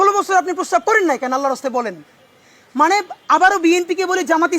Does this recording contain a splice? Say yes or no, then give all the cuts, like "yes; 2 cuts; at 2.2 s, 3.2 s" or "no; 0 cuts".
no; 0 cuts